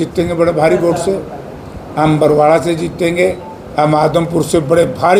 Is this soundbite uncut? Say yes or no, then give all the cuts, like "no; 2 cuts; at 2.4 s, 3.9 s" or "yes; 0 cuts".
yes; 0 cuts